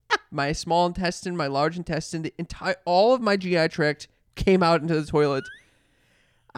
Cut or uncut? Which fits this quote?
uncut